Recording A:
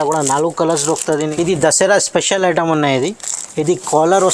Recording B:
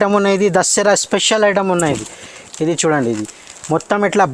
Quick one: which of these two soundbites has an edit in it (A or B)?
A